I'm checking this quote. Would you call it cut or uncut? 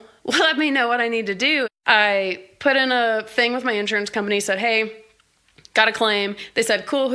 cut